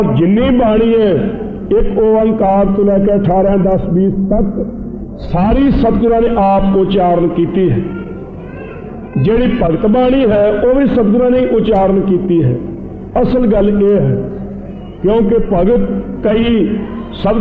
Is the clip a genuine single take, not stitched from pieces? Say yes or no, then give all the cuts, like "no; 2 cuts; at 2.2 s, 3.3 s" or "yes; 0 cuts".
yes; 0 cuts